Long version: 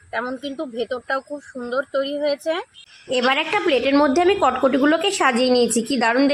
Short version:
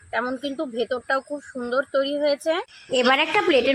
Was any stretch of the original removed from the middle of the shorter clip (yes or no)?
yes